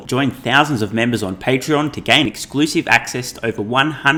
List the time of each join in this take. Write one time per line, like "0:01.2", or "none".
none

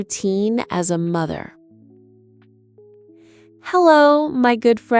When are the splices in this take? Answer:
0:01.5
0:03.6

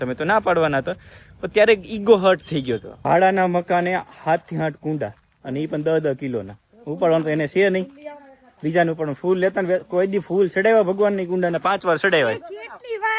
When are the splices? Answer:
0:02.9

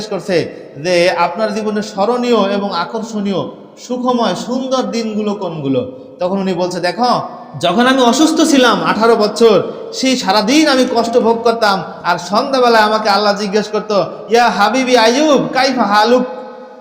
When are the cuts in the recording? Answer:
0:07.4

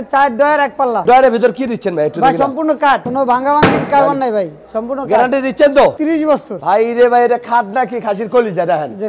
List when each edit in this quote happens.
0:01.0
0:03.0
0:06.2

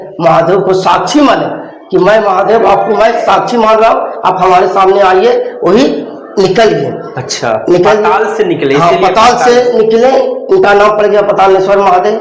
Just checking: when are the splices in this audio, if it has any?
none

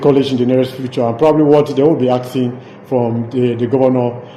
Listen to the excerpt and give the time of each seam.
none

